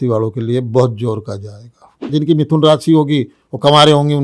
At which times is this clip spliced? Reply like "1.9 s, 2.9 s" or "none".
2.1 s